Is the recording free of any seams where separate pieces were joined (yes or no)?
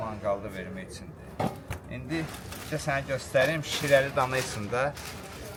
yes